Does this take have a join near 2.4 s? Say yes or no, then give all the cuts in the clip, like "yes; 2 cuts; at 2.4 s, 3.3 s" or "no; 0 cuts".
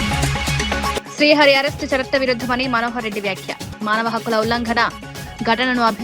no; 1 cut; at 0.9 s